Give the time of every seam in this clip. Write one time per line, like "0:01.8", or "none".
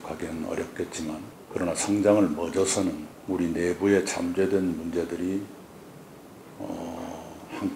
0:01.4
0:03.1